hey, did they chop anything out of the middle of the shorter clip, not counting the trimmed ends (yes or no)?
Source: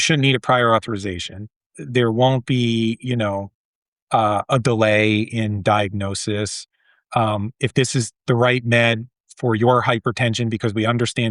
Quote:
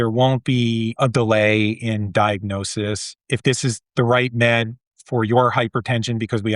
yes